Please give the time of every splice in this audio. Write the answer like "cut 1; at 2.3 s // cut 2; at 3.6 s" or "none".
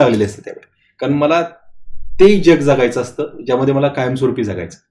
none